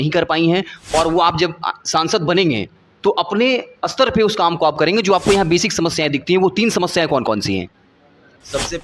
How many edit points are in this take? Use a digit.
0